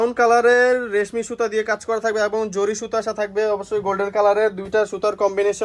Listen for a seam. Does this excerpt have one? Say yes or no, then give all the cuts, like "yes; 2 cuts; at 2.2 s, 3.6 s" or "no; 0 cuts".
no; 0 cuts